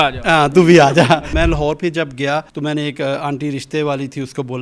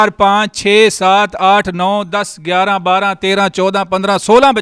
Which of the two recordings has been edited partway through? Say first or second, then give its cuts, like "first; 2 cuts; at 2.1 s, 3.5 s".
first; 2 cuts; at 1.3 s, 2.5 s